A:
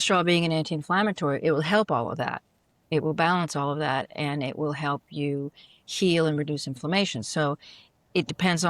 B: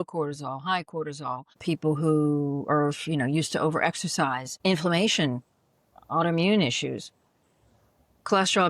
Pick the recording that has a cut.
B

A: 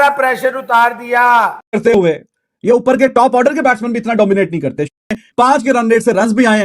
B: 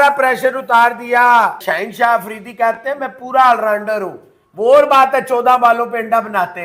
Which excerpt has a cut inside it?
A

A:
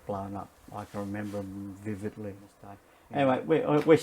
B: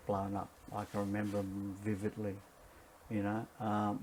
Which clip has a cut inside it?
A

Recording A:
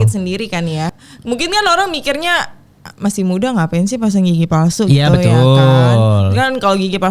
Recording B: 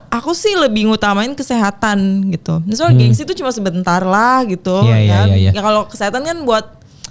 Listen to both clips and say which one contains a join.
A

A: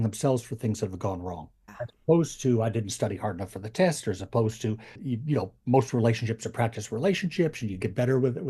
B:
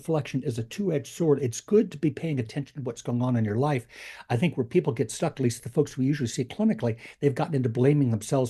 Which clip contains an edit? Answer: A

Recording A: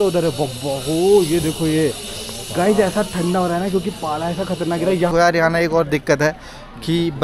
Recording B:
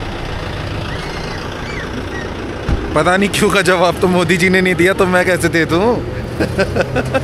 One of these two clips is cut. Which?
A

